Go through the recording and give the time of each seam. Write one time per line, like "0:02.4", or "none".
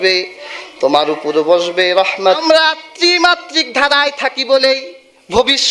0:02.4